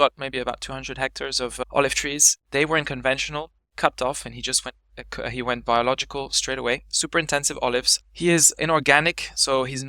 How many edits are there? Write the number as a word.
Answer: two